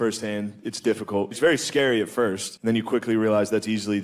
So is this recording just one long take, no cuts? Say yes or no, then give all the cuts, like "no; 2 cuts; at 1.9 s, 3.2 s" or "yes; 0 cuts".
no; 2 cuts; at 1.4 s, 2.5 s